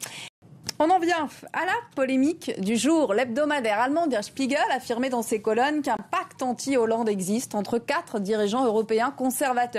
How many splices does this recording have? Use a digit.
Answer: 0